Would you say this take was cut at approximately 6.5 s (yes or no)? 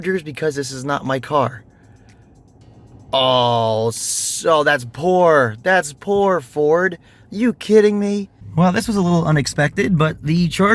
no